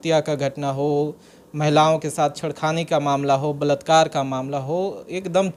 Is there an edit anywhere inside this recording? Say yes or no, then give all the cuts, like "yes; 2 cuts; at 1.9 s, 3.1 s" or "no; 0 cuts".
no; 0 cuts